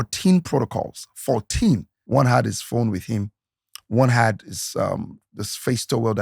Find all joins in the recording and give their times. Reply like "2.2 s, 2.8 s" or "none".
1.9 s